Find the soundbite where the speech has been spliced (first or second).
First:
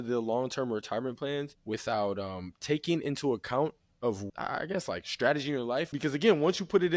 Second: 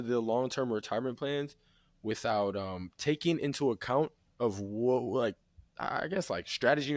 first